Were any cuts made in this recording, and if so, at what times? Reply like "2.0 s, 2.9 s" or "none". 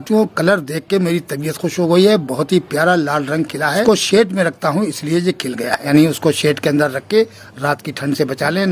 3.8 s, 5.9 s